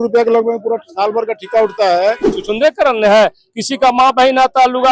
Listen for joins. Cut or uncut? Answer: cut